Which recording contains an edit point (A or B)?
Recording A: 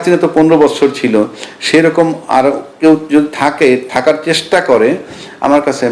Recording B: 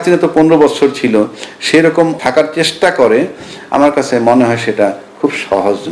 B